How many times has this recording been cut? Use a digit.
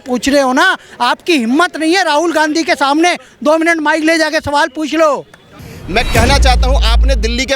1